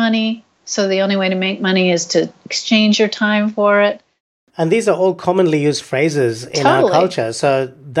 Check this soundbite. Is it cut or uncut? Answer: cut